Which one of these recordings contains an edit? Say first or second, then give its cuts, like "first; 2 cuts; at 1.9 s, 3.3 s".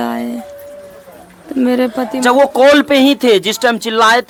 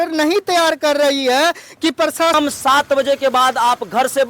second; 1 cut; at 2.3 s